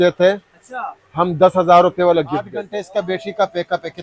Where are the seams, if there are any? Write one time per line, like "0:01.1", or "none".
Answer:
0:02.8